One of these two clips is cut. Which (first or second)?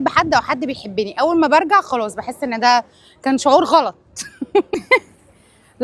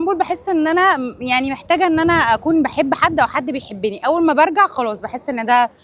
first